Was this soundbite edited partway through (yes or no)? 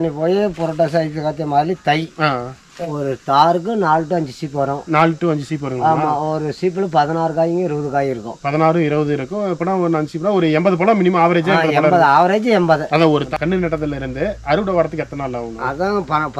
yes